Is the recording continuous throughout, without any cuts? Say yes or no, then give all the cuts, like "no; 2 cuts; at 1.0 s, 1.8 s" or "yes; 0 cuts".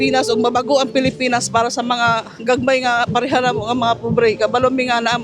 yes; 0 cuts